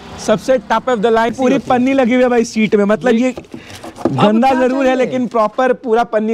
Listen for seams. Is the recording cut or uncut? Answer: cut